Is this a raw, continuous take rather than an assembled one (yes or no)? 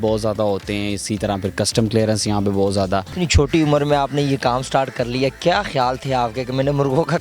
no